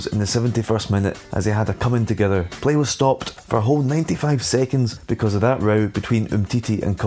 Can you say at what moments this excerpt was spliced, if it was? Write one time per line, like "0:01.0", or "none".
0:01.2
0:02.5
0:03.3
0:05.0